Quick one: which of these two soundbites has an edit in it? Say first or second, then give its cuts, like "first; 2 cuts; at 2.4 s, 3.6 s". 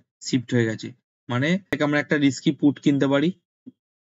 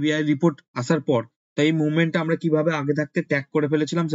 first; 1 cut; at 1.7 s